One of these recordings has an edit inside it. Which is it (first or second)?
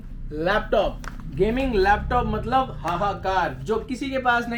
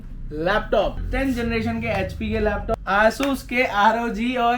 second